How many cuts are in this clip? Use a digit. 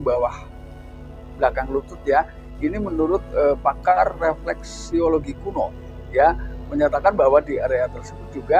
1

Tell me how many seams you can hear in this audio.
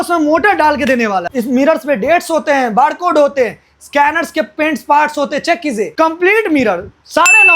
2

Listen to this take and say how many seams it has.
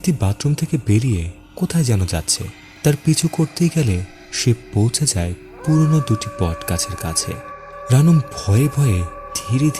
1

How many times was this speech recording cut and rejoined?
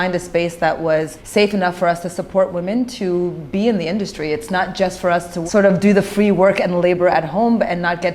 2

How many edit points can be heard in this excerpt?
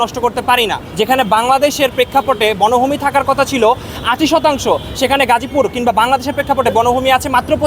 0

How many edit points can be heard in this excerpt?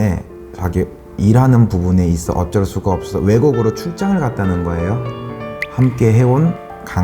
1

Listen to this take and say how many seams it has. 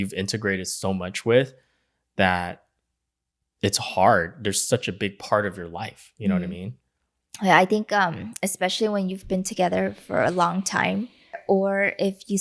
1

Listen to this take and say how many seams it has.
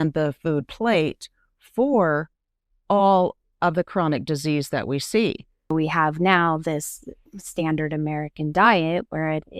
2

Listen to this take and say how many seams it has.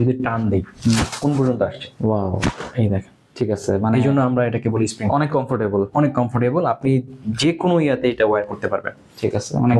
0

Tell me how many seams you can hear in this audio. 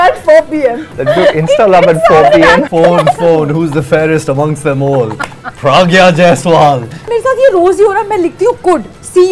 3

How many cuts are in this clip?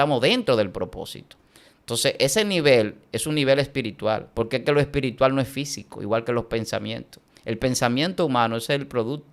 1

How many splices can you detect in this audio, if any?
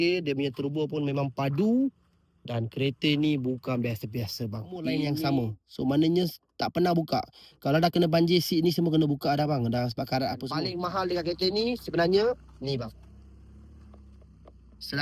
2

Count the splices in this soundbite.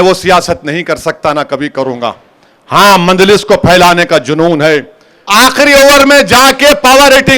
1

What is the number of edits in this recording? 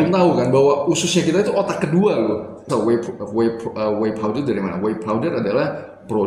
1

